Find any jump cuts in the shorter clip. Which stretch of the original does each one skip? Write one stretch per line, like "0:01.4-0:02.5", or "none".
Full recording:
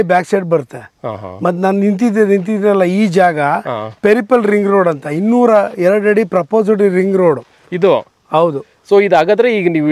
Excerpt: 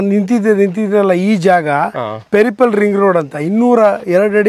none

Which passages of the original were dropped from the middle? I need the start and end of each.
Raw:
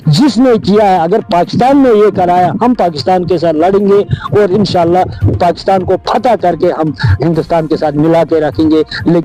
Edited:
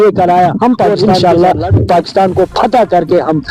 0:02.9-0:04.4

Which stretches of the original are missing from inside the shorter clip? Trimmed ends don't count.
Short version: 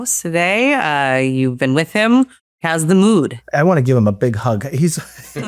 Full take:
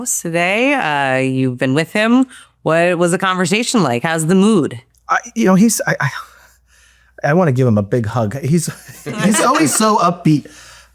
0:02.6-0:04.0
0:04.8-0:07.1

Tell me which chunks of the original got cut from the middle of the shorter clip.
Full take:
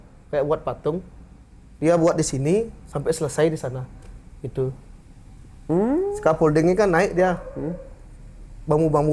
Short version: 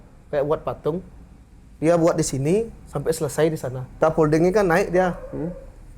0:03.9-0:06.2

